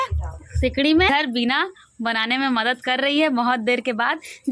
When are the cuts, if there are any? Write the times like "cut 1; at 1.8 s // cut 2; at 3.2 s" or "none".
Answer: cut 1; at 1.1 s